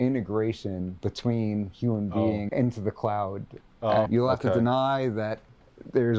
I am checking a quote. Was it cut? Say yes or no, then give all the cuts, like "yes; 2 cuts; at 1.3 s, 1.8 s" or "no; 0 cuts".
yes; 3 cuts; at 0.9 s, 2.5 s, 4.1 s